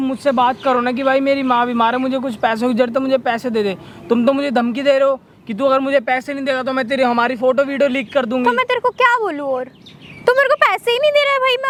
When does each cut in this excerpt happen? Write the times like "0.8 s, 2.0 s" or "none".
none